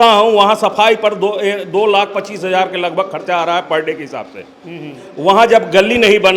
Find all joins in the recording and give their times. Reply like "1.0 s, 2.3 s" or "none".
none